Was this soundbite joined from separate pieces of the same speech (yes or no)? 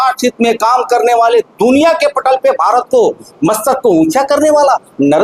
no